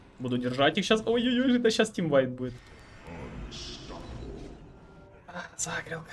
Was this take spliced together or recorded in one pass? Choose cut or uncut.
uncut